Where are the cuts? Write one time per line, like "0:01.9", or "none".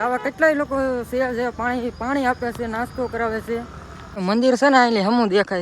0:04.2